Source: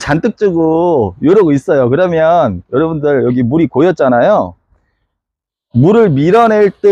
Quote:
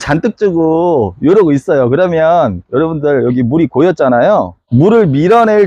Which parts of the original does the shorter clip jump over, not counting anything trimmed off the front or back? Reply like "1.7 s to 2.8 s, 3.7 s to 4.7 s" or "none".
4.6 s to 5.6 s